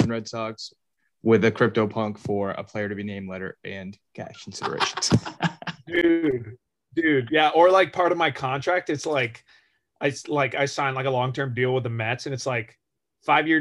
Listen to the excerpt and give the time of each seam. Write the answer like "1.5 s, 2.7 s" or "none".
6.0 s